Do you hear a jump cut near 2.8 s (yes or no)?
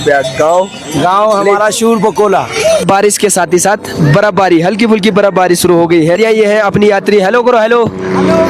yes